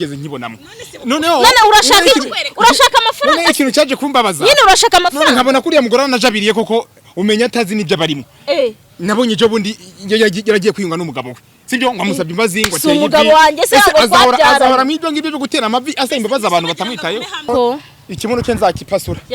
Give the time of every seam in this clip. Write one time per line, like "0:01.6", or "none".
0:17.5